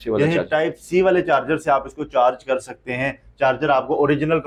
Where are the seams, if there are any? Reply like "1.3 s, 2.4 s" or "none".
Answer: none